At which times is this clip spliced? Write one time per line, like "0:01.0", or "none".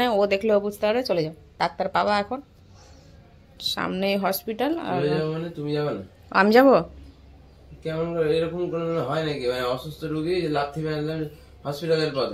none